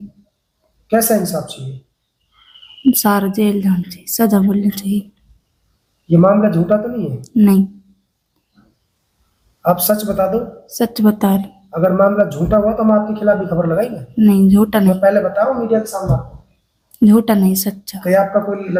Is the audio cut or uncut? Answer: uncut